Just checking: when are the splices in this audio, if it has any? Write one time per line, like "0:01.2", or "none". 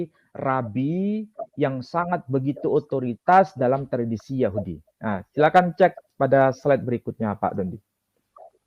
none